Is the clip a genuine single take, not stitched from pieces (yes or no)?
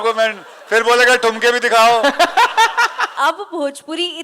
no